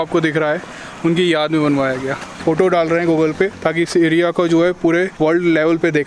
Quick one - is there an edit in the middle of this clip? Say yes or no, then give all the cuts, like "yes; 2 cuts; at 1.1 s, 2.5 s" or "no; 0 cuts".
yes; 3 cuts; at 2.3 s, 3.6 s, 5.1 s